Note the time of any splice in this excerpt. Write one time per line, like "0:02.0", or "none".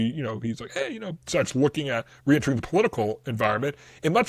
none

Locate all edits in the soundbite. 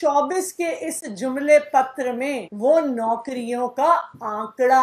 0:02.5

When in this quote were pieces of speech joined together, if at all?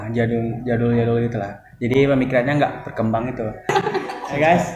0:03.7

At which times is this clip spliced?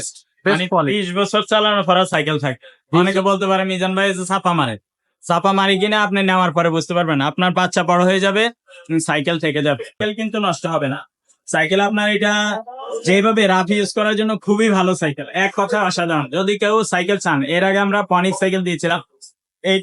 0:10.0

